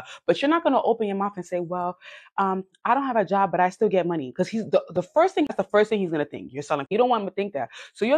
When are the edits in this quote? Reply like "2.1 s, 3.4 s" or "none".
5.5 s, 6.9 s